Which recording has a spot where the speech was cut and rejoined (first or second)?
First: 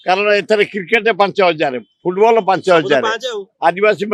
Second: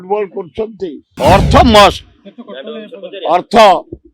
second